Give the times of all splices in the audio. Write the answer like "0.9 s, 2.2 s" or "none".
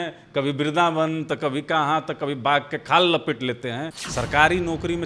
4.0 s

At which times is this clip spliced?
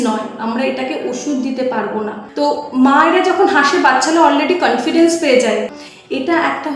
2.2 s, 5.8 s

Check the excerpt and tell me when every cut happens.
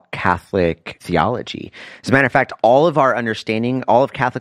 0.9 s

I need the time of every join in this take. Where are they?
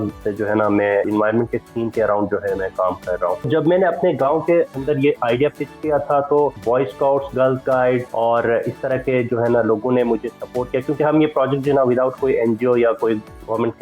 1.1 s, 3.5 s, 6.6 s, 8.1 s

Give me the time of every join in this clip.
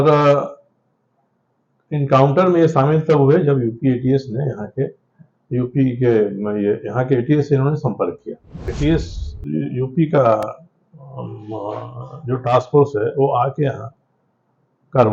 8.6 s

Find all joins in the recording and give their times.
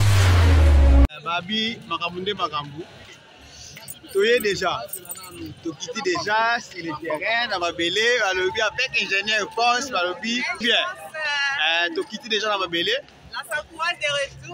1.1 s

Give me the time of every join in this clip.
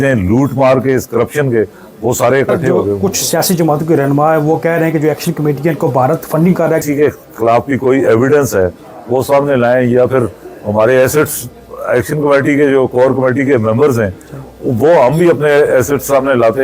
3.0 s, 6.8 s

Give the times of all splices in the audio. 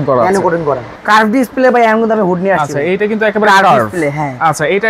1.0 s

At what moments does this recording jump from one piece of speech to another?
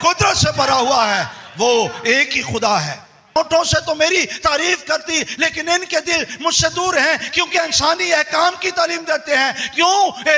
3.3 s

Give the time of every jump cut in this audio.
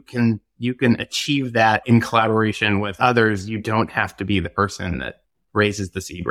1.8 s, 3.0 s, 5.2 s

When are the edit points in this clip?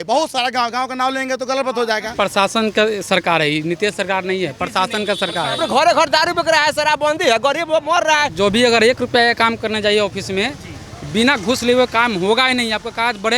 2.1 s, 5.6 s, 8.3 s

